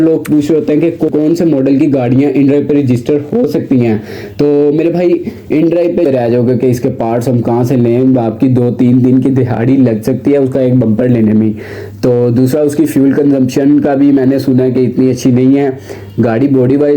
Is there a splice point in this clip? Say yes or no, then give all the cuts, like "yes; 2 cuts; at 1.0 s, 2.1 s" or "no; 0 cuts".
yes; 2 cuts; at 1.1 s, 6.0 s